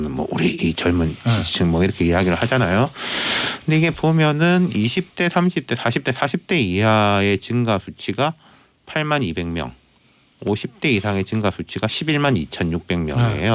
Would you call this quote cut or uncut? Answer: uncut